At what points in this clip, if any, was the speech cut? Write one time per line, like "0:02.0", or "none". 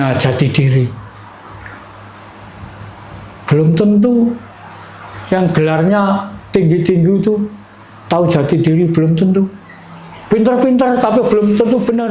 none